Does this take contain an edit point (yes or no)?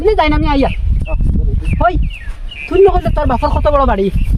no